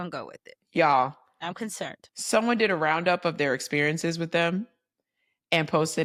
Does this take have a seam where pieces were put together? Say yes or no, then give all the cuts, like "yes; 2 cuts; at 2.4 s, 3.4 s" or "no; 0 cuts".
no; 0 cuts